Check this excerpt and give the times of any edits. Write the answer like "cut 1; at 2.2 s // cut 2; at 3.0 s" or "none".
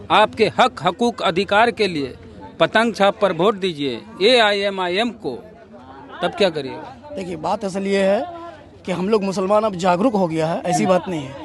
none